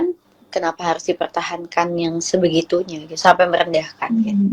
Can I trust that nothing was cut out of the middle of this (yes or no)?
yes